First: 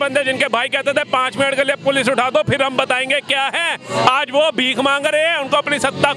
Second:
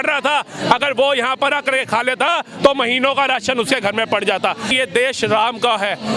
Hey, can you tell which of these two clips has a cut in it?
second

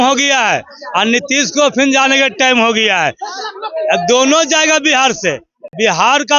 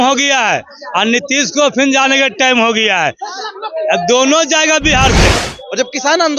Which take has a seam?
second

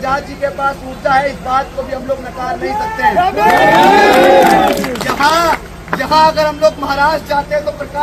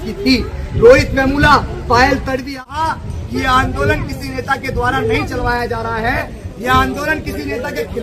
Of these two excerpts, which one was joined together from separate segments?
second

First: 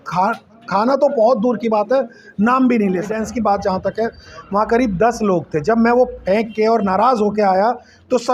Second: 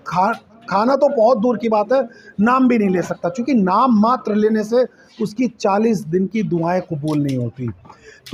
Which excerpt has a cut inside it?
first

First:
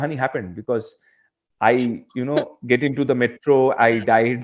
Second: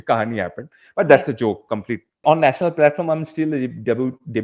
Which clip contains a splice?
second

